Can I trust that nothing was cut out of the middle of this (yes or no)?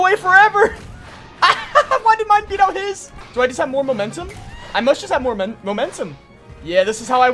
no